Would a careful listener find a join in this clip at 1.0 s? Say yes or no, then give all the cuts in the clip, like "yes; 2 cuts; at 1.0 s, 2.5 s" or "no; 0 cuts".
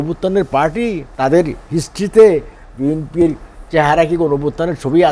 yes; 1 cut; at 1.0 s